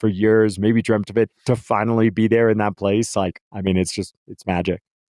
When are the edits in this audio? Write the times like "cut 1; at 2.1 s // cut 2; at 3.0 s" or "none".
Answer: cut 1; at 1.4 s // cut 2; at 3.5 s

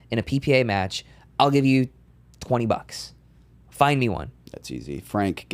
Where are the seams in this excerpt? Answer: none

